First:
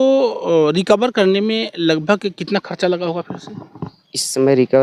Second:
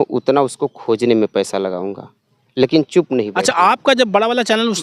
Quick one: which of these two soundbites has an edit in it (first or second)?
second